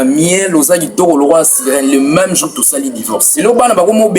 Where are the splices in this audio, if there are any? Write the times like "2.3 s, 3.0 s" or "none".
3.2 s